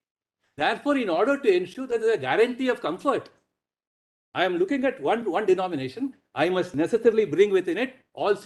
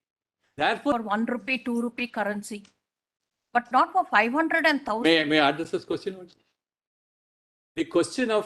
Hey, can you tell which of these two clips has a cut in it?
second; 1 cut; at 0.9 s

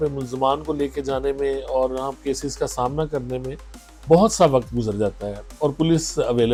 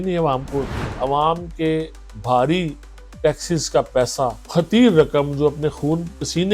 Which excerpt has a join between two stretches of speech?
second; 2 cuts; at 0.9 s, 4.4 s

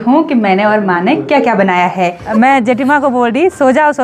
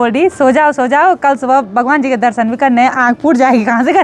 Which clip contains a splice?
first; 1 cut; at 2.2 s

